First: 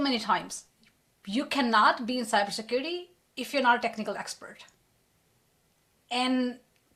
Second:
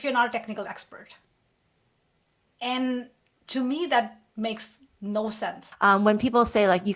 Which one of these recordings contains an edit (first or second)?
second